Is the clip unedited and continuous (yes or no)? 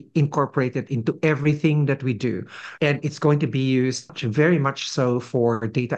no